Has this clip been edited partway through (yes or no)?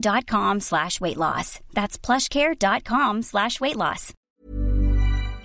yes